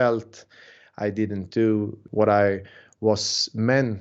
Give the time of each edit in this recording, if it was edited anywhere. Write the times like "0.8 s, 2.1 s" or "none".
2.0 s